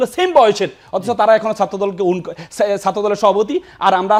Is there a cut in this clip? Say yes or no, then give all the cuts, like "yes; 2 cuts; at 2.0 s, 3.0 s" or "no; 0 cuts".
no; 0 cuts